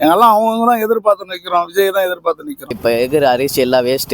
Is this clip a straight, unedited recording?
no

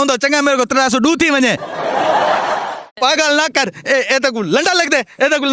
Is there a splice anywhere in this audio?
yes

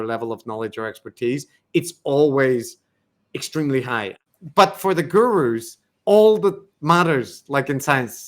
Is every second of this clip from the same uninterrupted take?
no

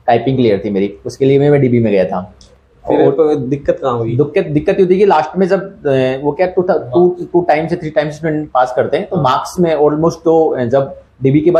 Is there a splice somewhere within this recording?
no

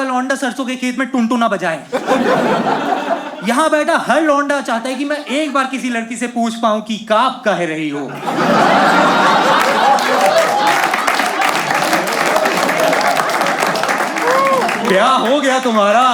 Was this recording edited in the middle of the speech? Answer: no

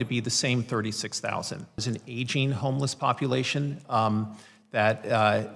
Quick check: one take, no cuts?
no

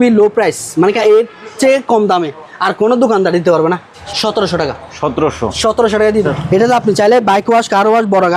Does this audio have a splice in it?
yes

